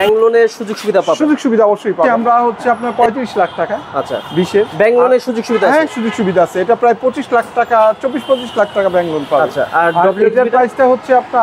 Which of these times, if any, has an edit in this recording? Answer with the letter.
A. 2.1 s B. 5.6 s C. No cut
A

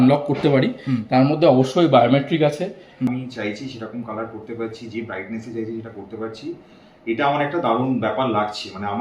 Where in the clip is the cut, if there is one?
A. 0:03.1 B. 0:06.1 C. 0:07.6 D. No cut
A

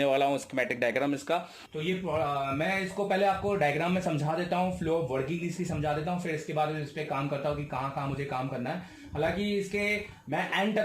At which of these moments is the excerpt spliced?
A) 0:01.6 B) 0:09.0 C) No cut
A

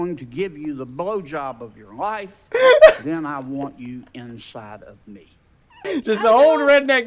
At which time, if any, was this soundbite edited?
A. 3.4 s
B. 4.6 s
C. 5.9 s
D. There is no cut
C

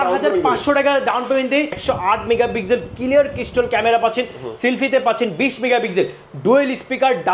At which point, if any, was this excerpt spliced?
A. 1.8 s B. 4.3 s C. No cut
A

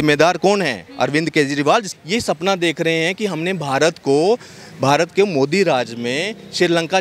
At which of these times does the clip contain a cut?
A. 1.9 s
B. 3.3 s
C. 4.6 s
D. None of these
A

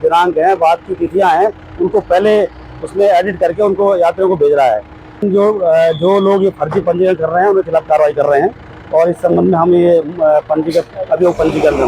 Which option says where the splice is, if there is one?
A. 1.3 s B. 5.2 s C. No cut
B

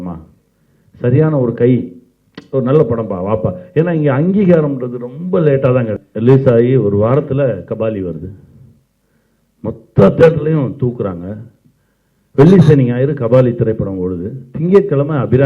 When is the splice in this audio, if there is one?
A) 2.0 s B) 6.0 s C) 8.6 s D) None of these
B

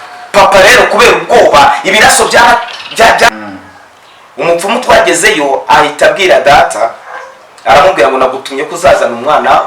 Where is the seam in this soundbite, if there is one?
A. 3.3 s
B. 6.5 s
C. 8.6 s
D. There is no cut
A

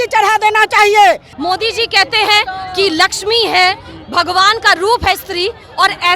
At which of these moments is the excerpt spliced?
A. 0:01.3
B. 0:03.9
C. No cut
A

